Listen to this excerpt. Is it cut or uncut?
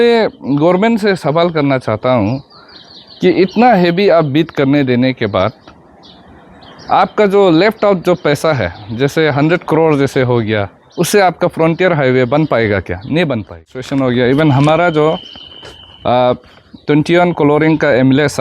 cut